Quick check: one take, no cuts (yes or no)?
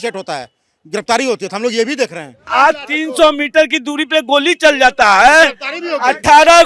no